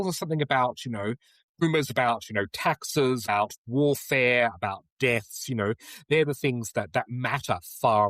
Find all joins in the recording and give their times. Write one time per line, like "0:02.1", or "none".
0:01.6
0:03.2